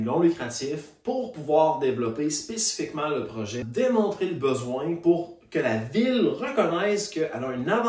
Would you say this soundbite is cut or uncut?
cut